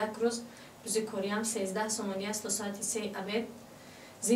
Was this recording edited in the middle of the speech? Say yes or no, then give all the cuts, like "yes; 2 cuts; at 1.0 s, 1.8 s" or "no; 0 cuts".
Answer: no; 0 cuts